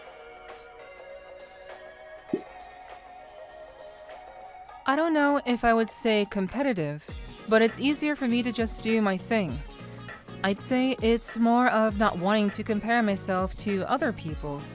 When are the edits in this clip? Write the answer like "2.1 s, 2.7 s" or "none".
none